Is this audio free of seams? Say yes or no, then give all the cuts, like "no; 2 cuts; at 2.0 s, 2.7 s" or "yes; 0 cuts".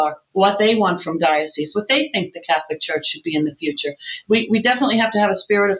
yes; 0 cuts